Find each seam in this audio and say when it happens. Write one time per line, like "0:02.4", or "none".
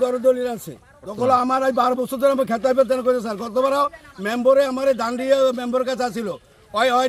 0:01.0